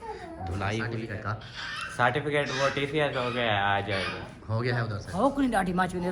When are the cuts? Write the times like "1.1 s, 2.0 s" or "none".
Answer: 1.1 s, 5.0 s